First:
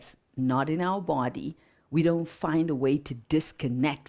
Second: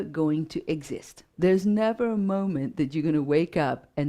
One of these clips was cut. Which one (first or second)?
second